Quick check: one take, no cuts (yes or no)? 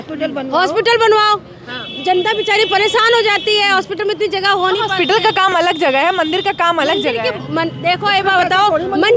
yes